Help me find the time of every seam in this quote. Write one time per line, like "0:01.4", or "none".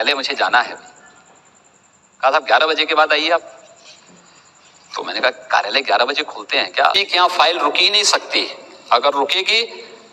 0:07.0